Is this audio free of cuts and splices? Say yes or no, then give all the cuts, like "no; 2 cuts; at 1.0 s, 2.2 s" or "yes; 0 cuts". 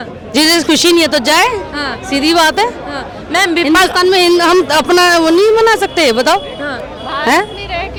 yes; 0 cuts